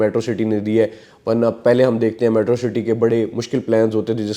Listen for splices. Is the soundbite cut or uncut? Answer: uncut